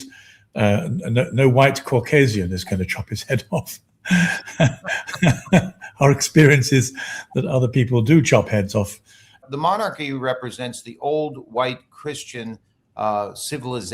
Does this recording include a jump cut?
yes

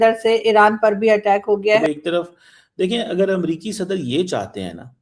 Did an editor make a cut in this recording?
yes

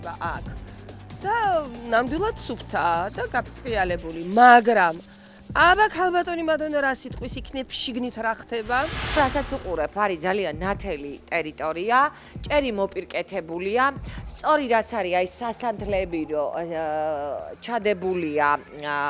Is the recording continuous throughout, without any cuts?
yes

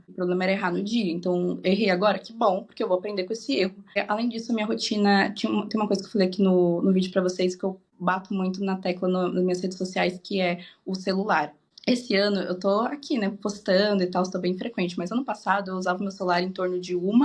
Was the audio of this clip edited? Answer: no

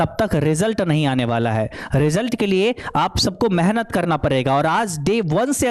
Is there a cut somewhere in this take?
no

